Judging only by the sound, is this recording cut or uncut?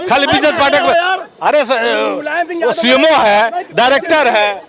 uncut